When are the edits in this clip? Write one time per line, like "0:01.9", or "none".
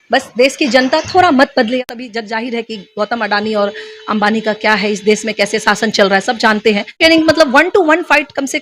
0:01.8
0:06.9